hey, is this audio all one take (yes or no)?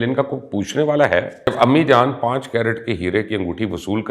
no